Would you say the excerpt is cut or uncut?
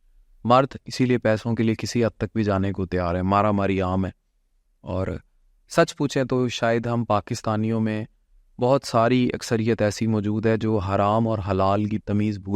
uncut